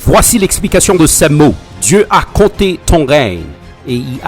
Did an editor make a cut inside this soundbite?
no; 0 cuts

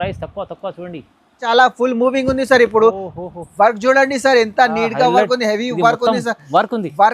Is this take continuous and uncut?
no; 1 cut; at 1.4 s

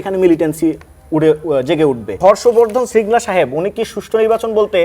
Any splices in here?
yes; 1 cut; at 2.1 s

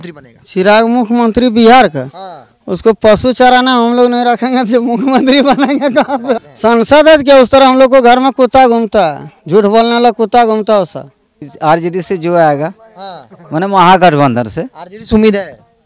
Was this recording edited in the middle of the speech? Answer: yes; 2 cuts; at 6.5 s, 11.4 s

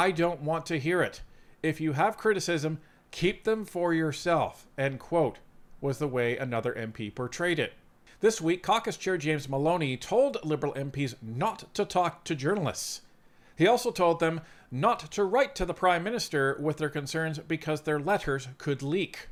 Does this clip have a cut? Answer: no; 0 cuts

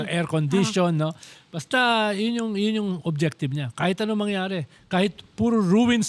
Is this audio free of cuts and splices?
yes; 0 cuts

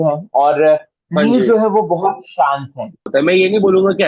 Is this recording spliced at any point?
yes; 1 cut; at 3.1 s

